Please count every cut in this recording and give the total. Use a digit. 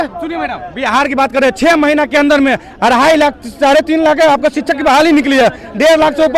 0